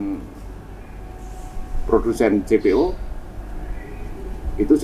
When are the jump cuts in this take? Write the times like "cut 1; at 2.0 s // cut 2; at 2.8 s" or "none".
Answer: none

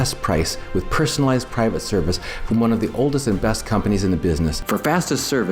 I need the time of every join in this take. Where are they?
cut 1; at 4.6 s

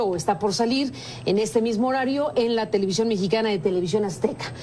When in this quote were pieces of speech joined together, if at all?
cut 1; at 2.3 s

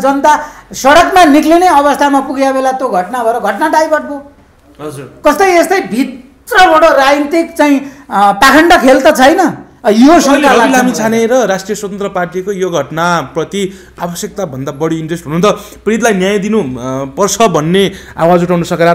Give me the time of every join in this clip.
none

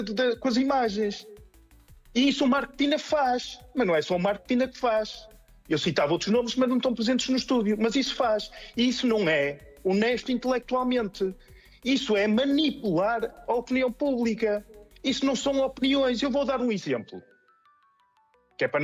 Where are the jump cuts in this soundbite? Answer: none

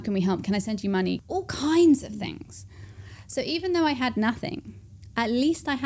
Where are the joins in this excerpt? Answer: cut 1; at 1.2 s

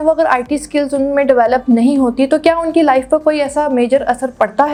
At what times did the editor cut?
none

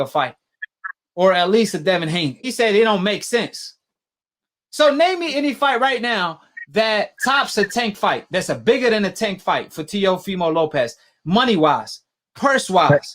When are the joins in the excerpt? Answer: cut 1; at 2.4 s

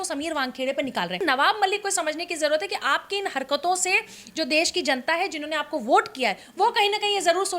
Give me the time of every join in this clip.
cut 1; at 1.2 s

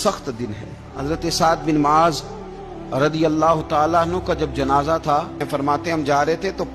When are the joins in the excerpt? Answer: cut 1; at 0.9 s // cut 2; at 5.5 s

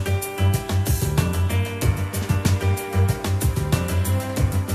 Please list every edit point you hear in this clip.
cut 1; at 3.8 s

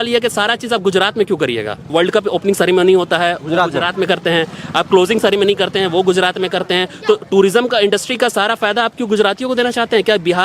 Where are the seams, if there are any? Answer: cut 1; at 1.9 s

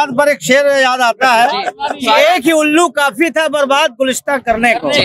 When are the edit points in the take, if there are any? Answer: none

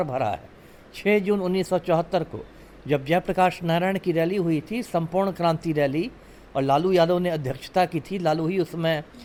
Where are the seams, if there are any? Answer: none

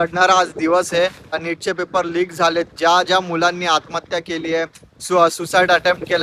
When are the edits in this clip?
cut 1; at 1.4 s

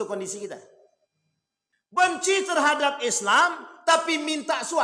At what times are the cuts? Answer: cut 1; at 2.0 s

